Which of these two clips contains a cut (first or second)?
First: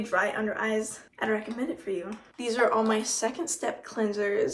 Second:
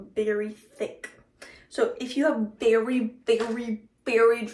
first